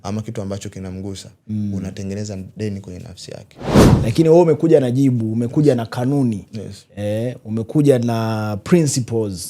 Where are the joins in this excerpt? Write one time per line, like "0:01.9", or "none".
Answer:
0:03.8